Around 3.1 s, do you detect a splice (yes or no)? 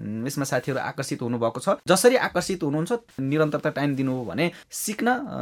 no